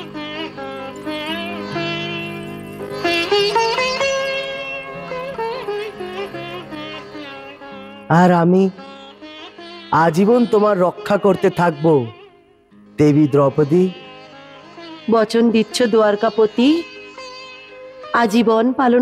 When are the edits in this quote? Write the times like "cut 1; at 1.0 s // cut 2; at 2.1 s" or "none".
none